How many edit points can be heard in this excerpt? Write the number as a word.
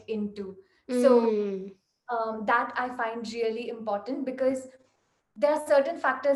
zero